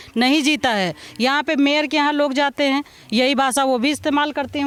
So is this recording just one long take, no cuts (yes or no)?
yes